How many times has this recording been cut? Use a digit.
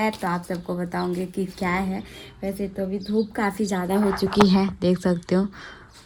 0